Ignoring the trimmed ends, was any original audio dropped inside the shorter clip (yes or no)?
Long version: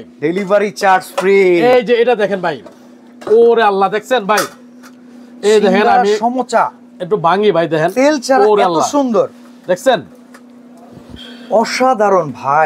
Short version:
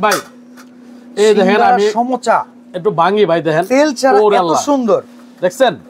no